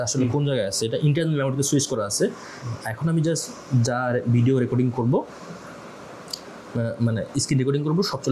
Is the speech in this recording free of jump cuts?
yes; 0 cuts

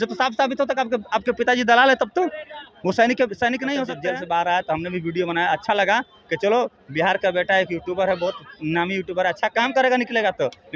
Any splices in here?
yes; 1 cut; at 3.9 s

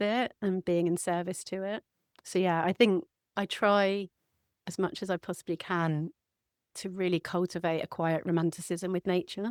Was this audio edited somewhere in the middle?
no; 0 cuts

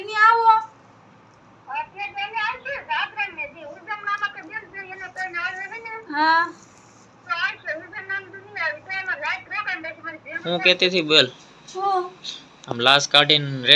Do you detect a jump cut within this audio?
yes; 1 cut; at 10.4 s

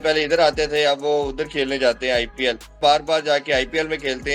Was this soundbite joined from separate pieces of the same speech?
yes; 1 cut; at 2.8 s

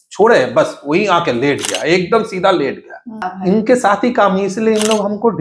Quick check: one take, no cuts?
no; 1 cut; at 3.3 s

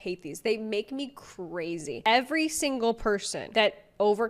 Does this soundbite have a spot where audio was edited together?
yes; 1 cut; at 1.9 s

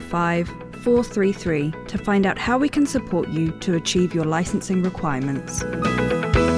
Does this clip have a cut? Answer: yes; 1 cut; at 5.6 s

